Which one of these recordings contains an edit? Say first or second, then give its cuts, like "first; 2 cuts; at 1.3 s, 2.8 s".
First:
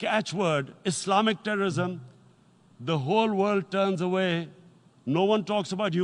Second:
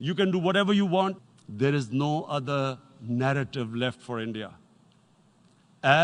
second; 1 cut; at 1.2 s